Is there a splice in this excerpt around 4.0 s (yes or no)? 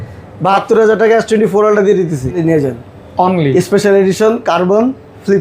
no